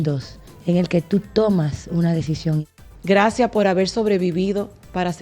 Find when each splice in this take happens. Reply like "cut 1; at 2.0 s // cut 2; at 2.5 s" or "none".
cut 1; at 2.6 s